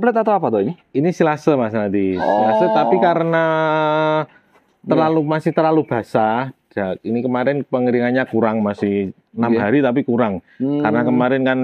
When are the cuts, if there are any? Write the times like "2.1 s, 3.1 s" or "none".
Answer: none